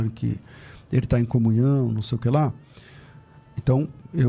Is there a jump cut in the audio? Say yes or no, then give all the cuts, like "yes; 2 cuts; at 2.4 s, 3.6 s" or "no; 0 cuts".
no; 0 cuts